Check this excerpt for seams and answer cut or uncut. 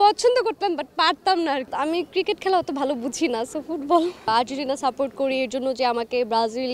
cut